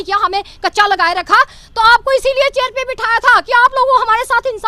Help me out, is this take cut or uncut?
uncut